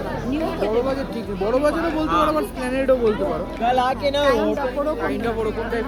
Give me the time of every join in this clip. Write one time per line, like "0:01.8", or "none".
none